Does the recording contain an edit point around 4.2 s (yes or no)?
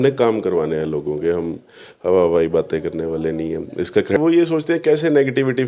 yes